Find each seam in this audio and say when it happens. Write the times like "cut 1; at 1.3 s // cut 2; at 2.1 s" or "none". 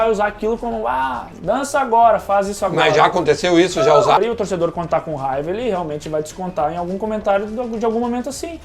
cut 1; at 4.2 s